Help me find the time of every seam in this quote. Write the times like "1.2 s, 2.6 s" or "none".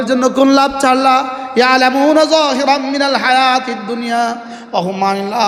none